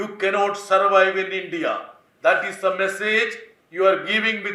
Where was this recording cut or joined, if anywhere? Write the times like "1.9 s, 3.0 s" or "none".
none